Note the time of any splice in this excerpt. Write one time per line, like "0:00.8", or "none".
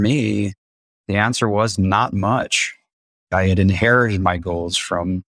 0:03.3